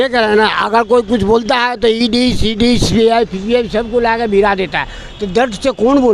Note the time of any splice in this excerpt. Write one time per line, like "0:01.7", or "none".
none